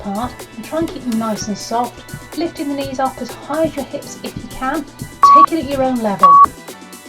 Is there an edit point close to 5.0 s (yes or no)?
yes